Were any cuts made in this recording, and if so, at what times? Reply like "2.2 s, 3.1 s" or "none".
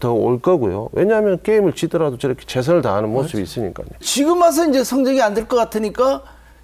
4.1 s